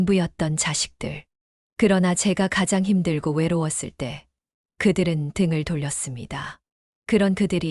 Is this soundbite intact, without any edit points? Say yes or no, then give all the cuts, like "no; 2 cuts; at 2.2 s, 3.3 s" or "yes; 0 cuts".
yes; 0 cuts